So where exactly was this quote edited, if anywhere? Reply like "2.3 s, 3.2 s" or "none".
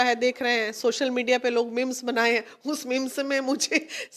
none